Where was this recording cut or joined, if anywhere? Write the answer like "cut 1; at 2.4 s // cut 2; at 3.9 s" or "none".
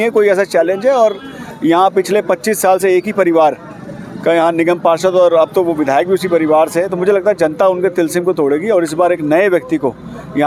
none